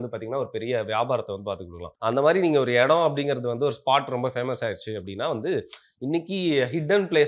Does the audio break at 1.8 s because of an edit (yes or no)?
no